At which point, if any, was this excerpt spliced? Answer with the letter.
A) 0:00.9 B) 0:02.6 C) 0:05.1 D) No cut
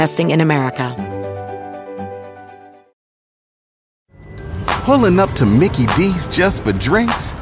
A